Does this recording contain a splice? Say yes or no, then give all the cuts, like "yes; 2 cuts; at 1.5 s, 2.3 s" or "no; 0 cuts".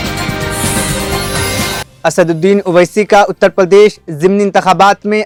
no; 0 cuts